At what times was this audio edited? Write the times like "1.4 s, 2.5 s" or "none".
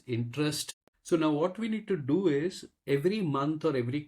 1.0 s